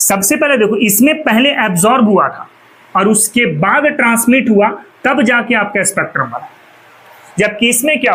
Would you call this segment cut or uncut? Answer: uncut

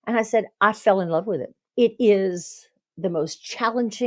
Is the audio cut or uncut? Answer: cut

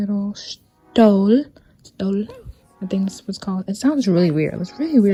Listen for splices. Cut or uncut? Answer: uncut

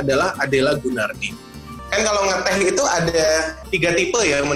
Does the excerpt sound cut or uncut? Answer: cut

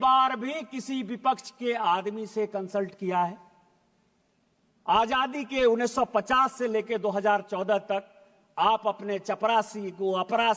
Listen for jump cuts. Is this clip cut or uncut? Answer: uncut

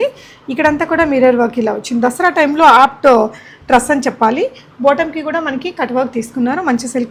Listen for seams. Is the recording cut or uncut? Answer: uncut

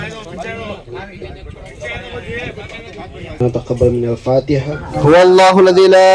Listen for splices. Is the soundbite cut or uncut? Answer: cut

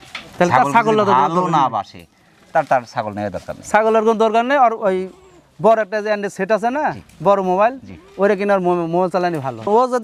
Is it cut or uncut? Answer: uncut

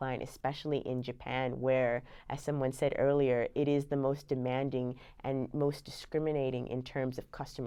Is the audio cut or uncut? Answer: uncut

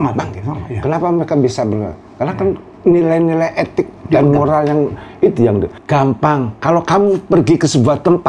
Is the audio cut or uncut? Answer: cut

